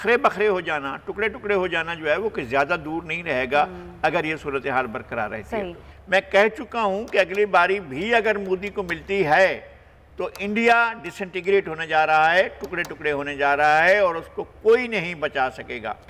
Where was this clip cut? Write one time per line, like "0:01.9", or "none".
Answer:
none